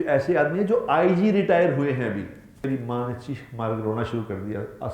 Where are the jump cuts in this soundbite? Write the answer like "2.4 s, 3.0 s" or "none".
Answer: 2.6 s